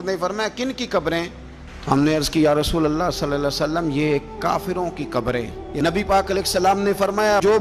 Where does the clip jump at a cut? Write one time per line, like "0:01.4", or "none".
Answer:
0:05.6